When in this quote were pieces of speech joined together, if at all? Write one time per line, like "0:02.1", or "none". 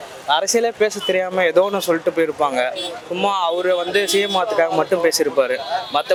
none